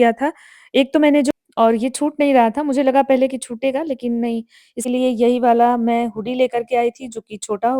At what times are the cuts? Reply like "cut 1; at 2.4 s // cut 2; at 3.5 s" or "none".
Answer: cut 1; at 1.3 s // cut 2; at 4.8 s